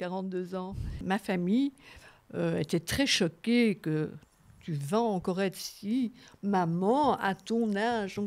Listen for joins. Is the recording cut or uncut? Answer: cut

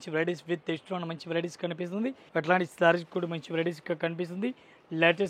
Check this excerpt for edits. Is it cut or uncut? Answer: cut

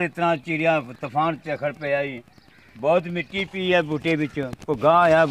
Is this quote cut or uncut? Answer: uncut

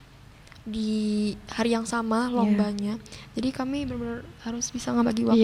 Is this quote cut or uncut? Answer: uncut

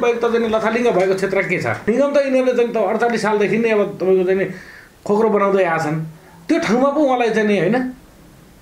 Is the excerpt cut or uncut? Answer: cut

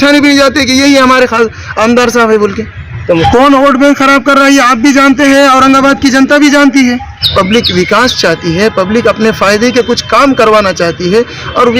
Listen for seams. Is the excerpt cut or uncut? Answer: cut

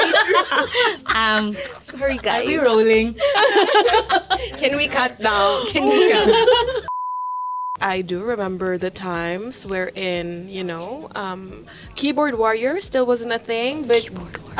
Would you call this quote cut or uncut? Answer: uncut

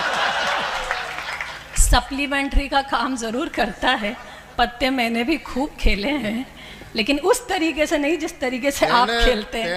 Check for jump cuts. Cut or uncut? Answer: uncut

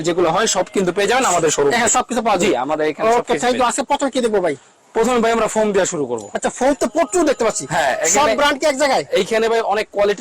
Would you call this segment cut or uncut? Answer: uncut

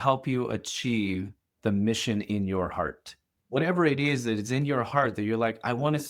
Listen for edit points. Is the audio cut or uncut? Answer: cut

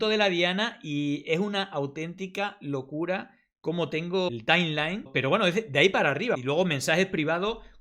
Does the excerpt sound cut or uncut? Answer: cut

